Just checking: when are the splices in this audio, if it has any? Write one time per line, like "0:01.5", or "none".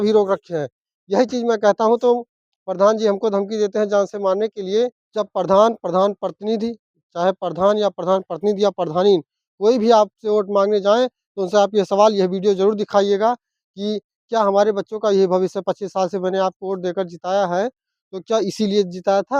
0:05.0